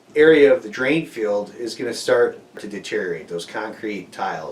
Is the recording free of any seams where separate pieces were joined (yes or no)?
no